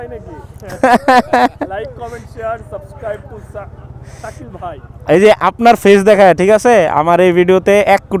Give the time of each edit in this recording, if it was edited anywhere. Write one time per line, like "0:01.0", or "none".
none